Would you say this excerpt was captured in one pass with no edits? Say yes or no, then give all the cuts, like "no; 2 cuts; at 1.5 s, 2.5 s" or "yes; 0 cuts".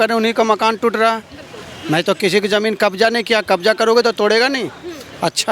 yes; 0 cuts